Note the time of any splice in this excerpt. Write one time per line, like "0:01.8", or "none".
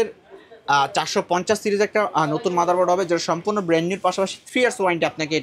none